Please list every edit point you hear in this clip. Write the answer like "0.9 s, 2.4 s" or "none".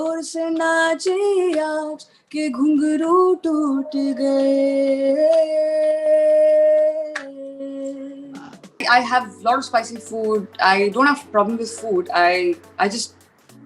8.8 s